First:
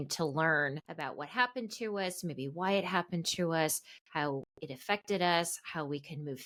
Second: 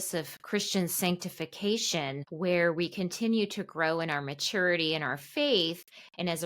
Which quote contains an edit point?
second; 1 cut; at 2.2 s

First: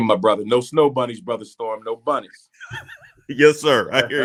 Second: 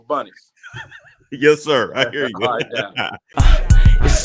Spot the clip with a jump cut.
second; 1 cut; at 3.2 s

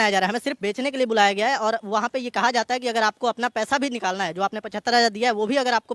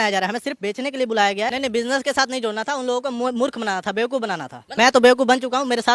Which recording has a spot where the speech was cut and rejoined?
second; 2 cuts; at 1.5 s, 4.6 s

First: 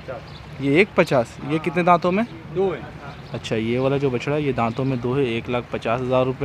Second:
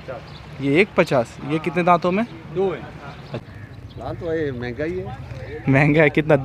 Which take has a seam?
second; 1 cut; at 3.4 s

